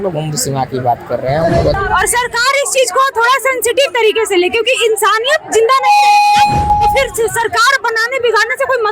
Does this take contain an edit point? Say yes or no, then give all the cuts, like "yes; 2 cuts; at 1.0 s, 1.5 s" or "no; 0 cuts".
yes; 1 cut; at 1.8 s